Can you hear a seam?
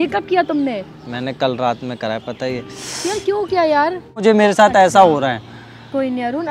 yes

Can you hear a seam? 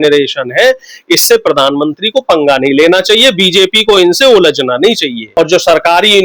yes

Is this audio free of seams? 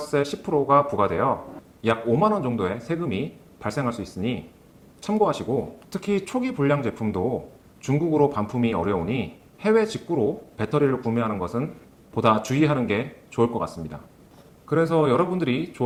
yes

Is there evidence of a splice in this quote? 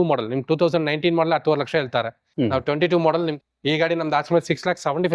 yes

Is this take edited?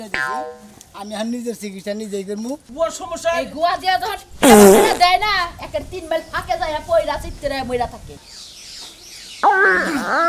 yes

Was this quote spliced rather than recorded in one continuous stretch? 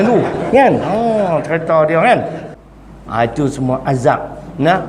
yes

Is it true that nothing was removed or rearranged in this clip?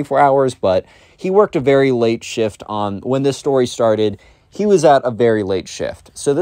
yes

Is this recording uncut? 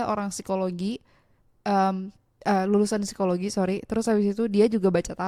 yes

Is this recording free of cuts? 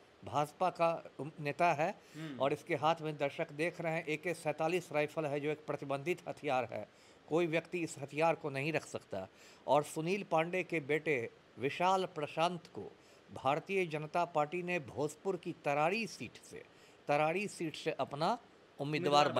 yes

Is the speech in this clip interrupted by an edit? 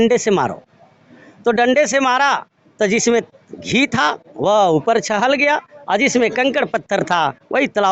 no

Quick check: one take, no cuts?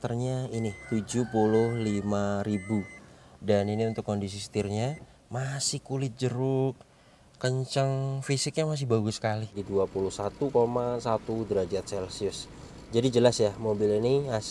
no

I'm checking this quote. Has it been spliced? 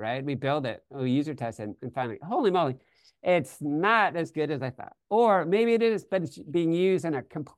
no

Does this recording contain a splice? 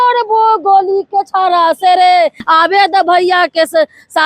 yes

